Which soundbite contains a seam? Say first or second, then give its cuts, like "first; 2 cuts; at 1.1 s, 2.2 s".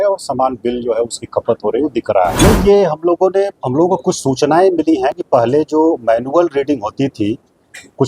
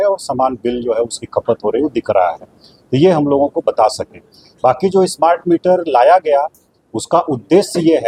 first; 1 cut; at 2.3 s